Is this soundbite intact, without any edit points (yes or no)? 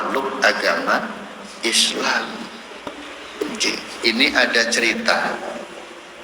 no